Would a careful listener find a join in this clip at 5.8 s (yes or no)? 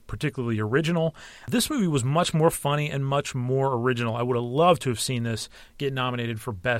no